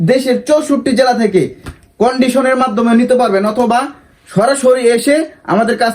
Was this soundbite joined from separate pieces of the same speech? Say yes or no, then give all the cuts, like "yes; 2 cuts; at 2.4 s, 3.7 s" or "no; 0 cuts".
no; 0 cuts